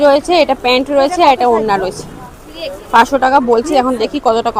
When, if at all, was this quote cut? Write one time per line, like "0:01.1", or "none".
none